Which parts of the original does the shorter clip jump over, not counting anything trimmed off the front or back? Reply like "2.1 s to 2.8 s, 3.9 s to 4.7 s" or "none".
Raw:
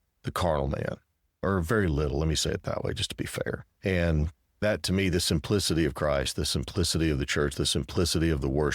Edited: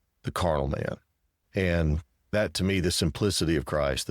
1.3 s to 3.6 s